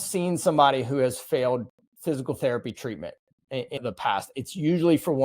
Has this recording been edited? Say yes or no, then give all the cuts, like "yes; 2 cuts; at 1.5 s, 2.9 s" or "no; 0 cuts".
yes; 1 cut; at 3.8 s